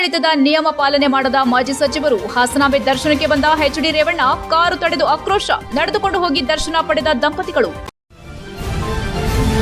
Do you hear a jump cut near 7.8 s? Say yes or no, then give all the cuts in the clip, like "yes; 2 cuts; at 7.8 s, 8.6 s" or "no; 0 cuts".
yes; 1 cut; at 7.8 s